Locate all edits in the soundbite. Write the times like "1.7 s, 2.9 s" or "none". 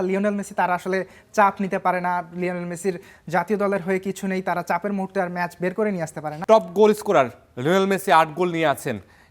6.4 s